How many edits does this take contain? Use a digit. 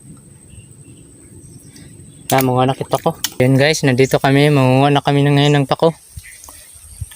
1